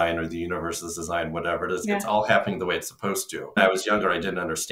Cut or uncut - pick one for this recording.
cut